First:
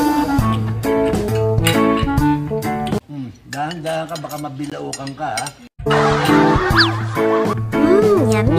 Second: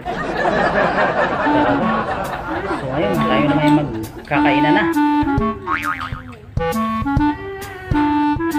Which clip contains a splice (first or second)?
first